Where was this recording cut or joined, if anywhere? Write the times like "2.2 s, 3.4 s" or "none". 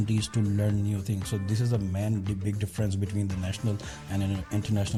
none